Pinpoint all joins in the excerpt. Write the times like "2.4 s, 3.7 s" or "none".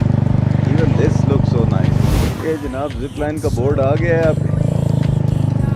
2.1 s